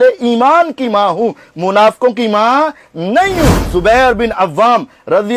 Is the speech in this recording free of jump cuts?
no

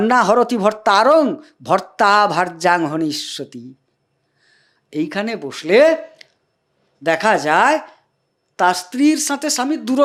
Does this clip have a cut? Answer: no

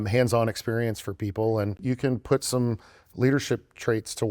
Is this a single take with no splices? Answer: no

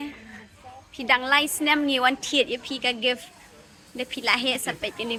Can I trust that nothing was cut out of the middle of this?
yes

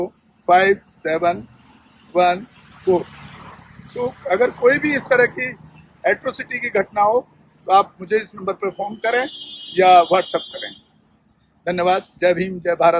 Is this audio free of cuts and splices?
yes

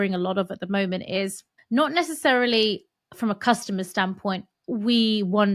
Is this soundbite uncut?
no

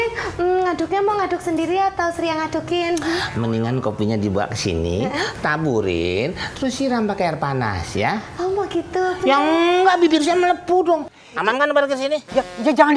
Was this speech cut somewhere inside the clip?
yes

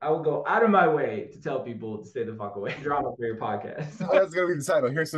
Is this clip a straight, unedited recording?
no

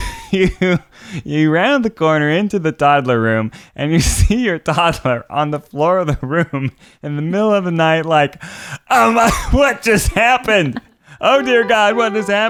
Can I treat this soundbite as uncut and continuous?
yes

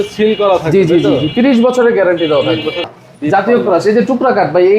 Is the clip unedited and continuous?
no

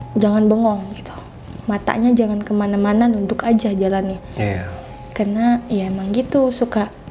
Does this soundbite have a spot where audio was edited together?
no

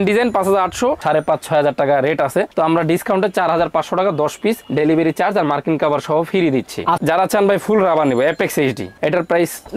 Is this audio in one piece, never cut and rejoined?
no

